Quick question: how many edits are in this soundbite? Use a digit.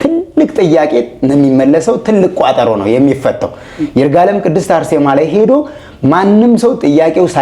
0